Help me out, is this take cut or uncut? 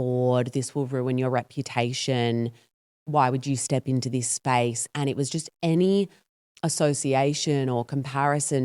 uncut